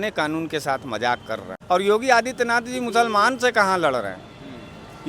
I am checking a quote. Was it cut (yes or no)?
yes